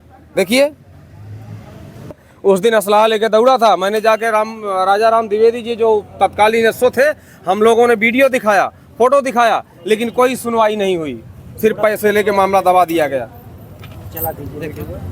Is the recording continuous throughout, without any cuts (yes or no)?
no